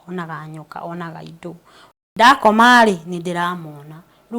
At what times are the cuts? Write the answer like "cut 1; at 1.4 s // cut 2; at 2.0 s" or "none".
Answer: cut 1; at 2.1 s